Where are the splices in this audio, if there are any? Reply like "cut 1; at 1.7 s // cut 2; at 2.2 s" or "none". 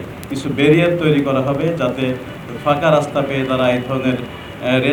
none